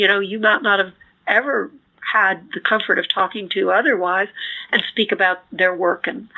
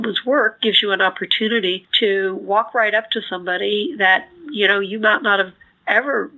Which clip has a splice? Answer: second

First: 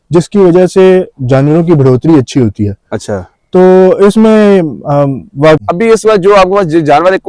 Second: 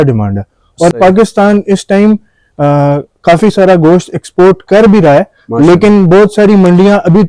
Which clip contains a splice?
first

